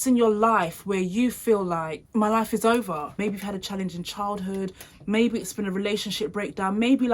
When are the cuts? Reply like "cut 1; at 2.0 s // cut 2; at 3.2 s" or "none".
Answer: cut 1; at 3.1 s